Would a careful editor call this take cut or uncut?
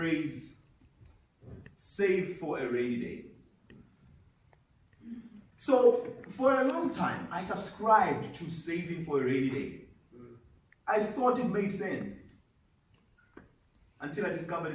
cut